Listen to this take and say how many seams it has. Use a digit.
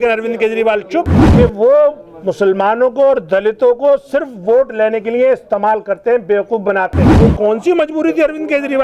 2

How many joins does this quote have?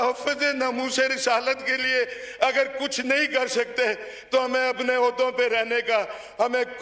0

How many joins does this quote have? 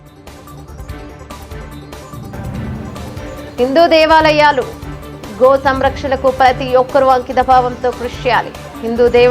1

